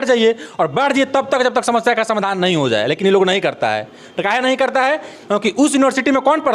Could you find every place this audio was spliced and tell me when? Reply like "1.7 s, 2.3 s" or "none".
none